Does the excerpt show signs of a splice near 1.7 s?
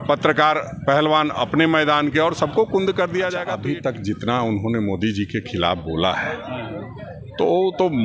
no; 1 cut; at 3.5 s

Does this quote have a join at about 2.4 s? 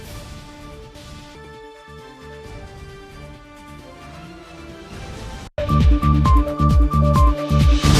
no; 1 cut; at 5.5 s

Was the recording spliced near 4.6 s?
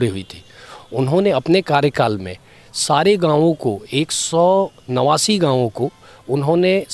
no; 0 cuts

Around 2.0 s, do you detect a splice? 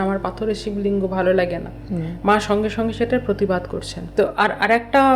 no; 1 cut; at 4.1 s

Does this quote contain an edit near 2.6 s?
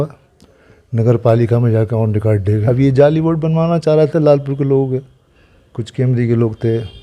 yes; 1 cut; at 2.6 s

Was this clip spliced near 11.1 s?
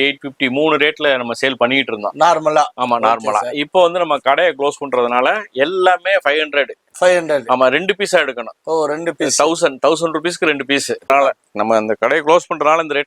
yes; 1 cut; at 11.1 s

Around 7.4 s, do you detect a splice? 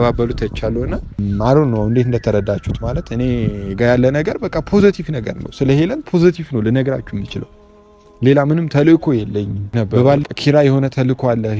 no; 2 cuts; at 1.2 s, 10.3 s

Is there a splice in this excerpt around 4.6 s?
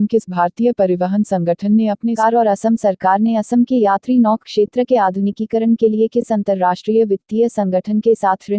no; 1 cut; at 2.2 s

